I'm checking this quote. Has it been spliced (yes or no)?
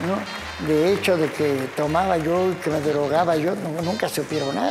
no